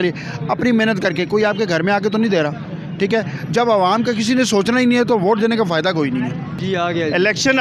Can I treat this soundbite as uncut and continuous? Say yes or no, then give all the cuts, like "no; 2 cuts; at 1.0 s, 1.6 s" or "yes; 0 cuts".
no; 1 cut; at 6.6 s